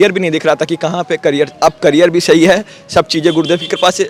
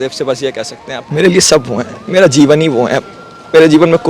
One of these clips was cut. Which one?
second; 1 cut; at 1.0 s

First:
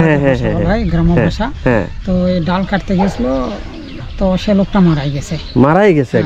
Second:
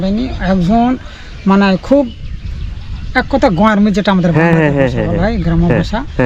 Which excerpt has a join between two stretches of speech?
first; 1 cut; at 4.1 s

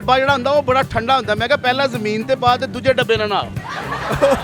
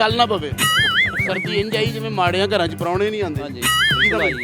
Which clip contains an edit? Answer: second; 1 cut; at 1.1 s

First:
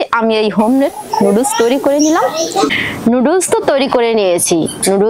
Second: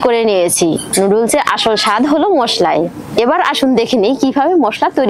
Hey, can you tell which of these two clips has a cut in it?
first; 1 cut; at 2.7 s

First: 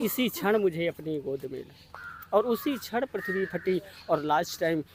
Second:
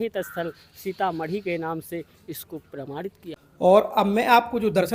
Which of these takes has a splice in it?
second; 1 cut; at 3.3 s

